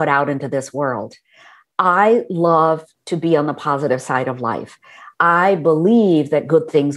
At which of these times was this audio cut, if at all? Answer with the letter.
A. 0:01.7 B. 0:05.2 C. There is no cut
C